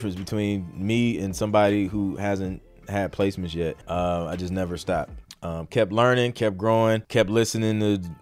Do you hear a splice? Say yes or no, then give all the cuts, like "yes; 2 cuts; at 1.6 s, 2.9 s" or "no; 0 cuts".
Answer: yes; 3 cuts; at 3.8 s, 5.2 s, 7.0 s